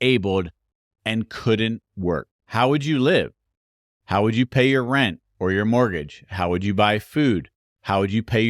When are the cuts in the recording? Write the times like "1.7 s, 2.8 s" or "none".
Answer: 2.4 s